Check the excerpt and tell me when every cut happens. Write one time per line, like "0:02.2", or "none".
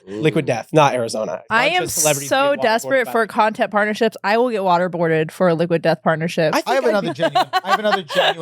0:01.4